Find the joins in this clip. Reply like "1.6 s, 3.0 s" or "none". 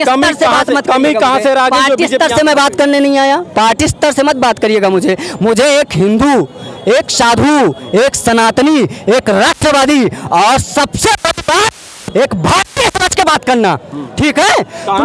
none